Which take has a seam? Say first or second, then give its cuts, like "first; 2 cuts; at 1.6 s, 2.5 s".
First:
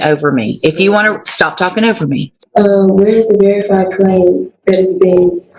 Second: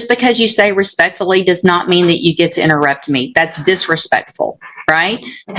first; 1 cut; at 2.3 s